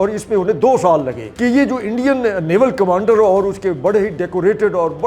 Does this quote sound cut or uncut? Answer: cut